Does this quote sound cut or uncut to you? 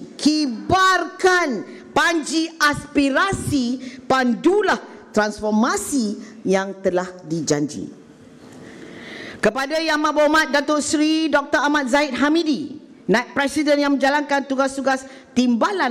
uncut